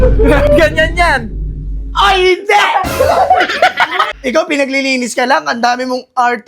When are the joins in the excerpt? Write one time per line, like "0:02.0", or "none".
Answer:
0:04.1